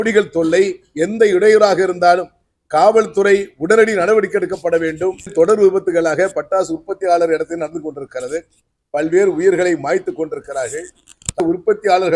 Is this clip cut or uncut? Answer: cut